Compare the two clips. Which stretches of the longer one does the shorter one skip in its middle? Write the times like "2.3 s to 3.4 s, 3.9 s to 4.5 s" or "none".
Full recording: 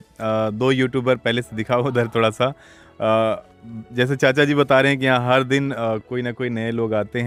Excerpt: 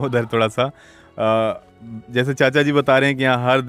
none